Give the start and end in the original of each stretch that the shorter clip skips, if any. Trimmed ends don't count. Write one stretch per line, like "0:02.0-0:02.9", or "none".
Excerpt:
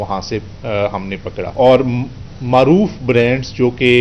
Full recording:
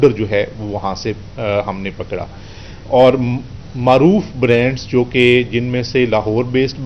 0:02.2-0:02.8